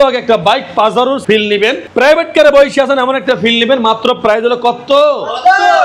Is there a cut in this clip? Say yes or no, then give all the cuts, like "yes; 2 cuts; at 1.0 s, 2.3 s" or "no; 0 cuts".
yes; 1 cut; at 1.2 s